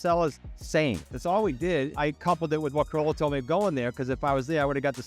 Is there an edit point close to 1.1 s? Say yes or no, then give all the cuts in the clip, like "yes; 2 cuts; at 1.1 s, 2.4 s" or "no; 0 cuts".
yes; 2 cuts; at 1.1 s, 1.9 s